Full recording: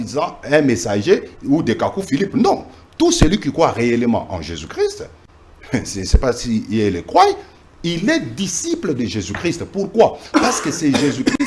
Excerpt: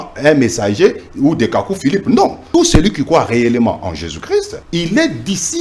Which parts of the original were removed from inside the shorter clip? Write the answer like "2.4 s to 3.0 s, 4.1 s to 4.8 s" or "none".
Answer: 2.7 s to 2.9 s, 5.1 s to 7.7 s